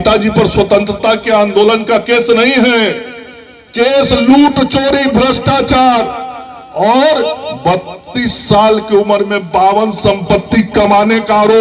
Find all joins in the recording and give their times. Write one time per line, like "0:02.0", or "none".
none